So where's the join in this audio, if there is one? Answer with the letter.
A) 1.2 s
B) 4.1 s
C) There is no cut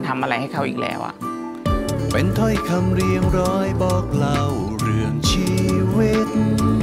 A